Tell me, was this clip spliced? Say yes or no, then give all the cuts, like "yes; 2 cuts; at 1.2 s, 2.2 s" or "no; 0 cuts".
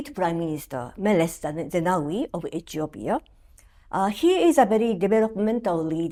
no; 0 cuts